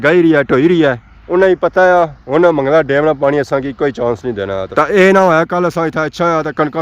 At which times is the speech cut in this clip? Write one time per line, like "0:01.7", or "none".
0:04.7